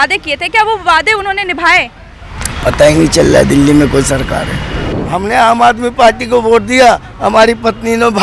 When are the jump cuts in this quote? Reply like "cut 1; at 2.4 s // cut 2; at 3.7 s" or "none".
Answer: none